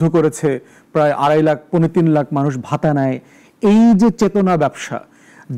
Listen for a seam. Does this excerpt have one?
no; 0 cuts

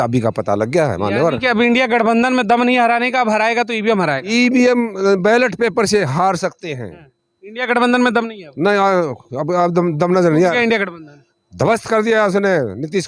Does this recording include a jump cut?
no; 0 cuts

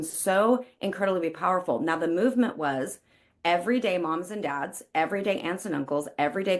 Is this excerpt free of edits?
yes; 0 cuts

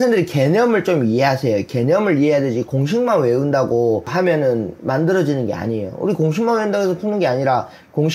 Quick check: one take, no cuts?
no; 1 cut; at 4.1 s

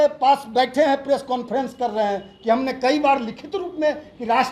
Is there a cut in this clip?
no; 0 cuts

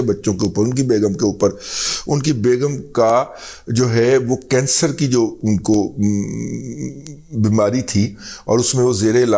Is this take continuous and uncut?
yes; 0 cuts

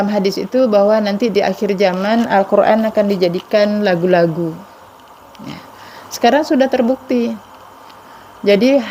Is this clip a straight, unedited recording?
yes; 0 cuts

